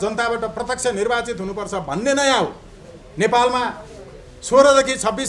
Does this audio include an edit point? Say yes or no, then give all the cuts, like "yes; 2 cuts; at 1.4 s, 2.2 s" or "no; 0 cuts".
no; 0 cuts